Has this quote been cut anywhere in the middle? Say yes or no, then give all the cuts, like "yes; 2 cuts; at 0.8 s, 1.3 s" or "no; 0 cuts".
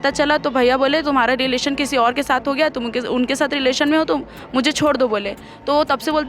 no; 0 cuts